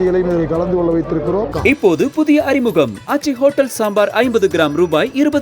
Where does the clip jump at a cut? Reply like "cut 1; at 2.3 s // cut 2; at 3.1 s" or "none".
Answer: cut 1; at 1.5 s